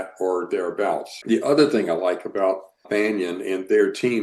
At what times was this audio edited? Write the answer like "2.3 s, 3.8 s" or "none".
1.1 s, 2.8 s